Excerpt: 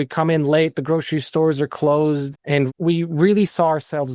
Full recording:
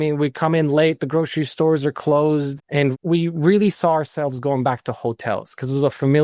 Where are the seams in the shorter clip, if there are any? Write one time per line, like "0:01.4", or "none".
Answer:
none